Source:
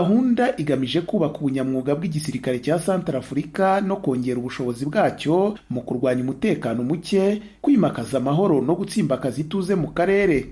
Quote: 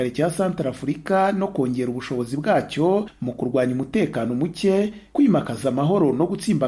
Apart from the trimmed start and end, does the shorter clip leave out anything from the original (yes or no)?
no